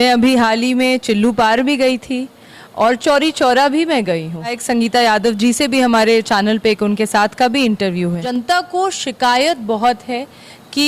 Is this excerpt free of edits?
no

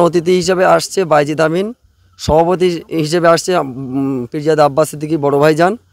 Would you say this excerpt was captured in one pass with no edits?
yes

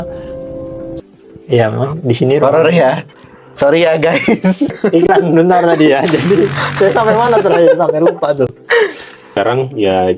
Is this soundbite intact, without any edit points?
no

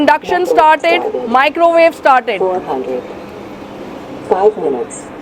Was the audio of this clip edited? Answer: no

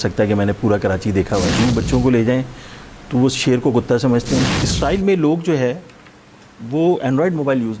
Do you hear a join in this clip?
yes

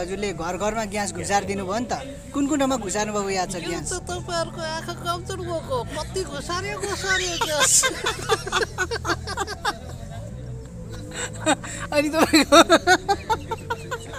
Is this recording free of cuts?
yes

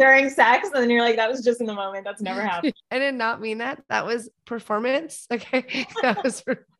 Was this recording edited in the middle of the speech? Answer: yes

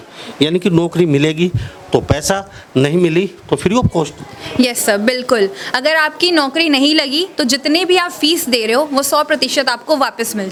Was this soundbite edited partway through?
no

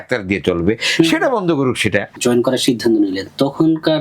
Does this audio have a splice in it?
yes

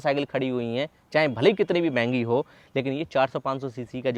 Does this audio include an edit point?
no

